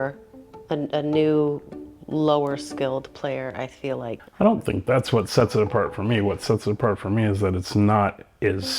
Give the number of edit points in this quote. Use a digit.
1